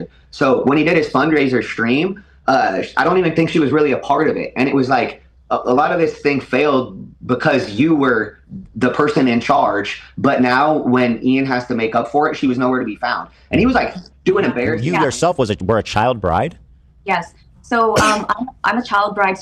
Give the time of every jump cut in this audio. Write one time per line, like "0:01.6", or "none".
0:14.8